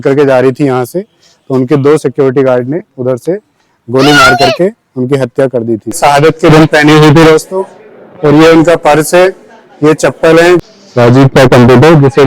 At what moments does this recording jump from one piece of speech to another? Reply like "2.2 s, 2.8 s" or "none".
6.0 s, 10.6 s